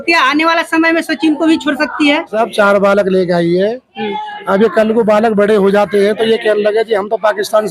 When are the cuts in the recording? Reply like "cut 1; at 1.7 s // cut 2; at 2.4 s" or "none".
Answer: cut 1; at 2.3 s